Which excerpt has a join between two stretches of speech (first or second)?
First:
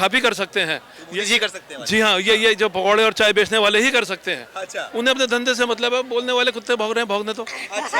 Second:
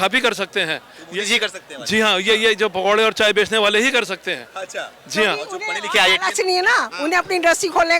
first